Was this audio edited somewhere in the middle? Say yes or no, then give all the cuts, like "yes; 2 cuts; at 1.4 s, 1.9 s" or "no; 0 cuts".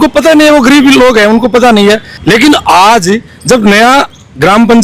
no; 0 cuts